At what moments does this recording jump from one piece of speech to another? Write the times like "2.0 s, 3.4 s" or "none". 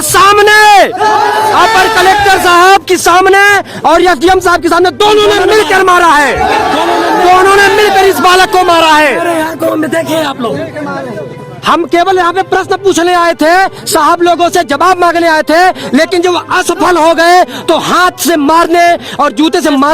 none